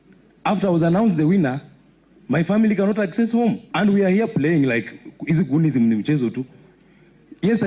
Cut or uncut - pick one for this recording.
cut